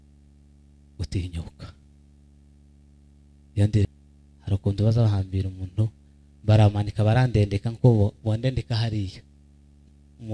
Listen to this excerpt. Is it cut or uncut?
cut